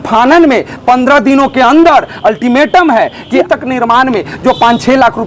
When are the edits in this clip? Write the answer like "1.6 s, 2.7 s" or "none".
3.4 s